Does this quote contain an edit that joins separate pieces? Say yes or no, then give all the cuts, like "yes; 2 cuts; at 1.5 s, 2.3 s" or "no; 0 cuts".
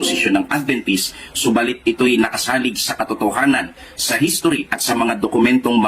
yes; 1 cut; at 3.8 s